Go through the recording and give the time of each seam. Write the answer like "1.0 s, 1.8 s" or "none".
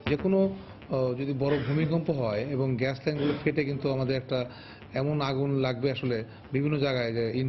none

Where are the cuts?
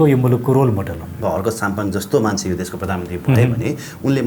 1.2 s

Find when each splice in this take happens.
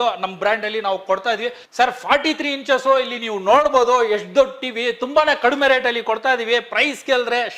1.6 s

